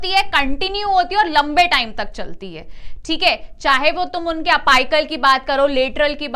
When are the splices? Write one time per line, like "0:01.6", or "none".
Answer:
none